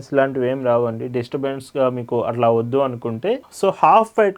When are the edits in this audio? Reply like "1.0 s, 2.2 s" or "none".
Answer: 3.5 s